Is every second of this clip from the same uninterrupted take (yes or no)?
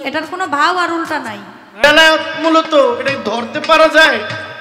no